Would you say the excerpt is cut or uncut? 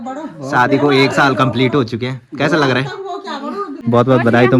cut